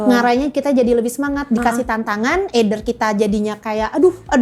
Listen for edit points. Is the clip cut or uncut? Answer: uncut